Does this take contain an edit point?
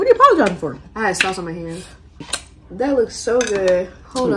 yes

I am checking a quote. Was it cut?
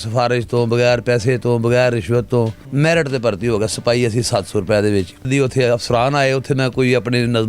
yes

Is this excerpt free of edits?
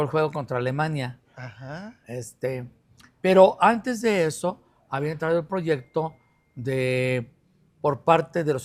yes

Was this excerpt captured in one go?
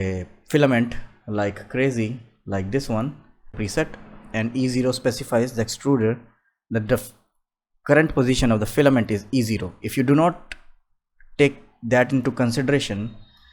no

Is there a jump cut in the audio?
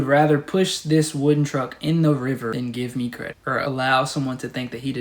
yes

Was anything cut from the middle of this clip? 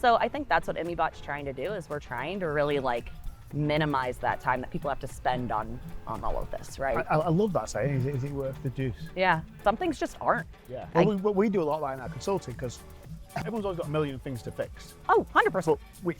yes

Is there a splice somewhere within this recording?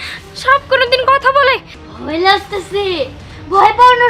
yes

